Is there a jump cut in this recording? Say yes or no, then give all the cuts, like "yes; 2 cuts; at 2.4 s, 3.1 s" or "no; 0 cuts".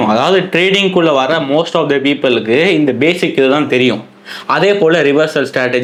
no; 0 cuts